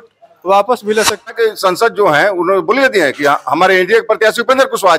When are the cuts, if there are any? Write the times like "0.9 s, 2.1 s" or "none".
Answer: 1.3 s